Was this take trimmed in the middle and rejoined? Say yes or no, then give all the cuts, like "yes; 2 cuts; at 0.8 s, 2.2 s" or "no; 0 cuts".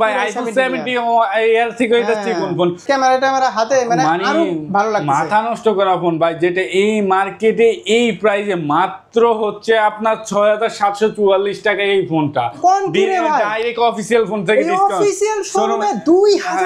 yes; 2 cuts; at 2.8 s, 12.6 s